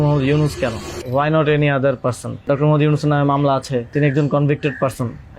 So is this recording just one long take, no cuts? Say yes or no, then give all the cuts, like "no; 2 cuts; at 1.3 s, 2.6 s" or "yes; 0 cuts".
no; 3 cuts; at 0.9 s, 2.4 s, 3.9 s